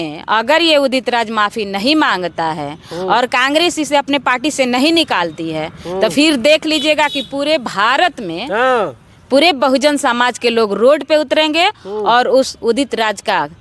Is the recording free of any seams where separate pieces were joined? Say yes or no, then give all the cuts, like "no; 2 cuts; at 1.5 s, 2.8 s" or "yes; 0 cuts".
yes; 0 cuts